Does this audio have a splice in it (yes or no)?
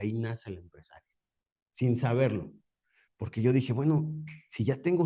no